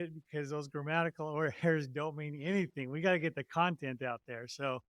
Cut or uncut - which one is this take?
uncut